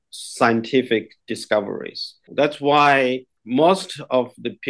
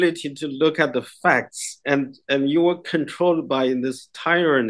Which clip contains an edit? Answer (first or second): first